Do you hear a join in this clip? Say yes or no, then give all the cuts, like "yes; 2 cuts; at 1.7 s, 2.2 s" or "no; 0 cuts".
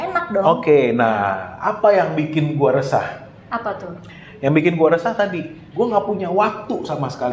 no; 0 cuts